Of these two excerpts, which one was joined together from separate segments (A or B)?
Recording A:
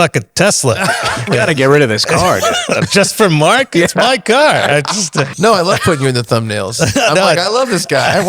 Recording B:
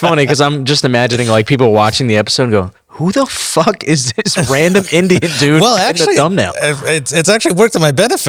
A